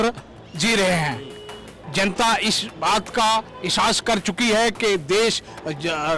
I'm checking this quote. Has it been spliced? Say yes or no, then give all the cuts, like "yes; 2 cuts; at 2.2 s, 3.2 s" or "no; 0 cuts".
no; 0 cuts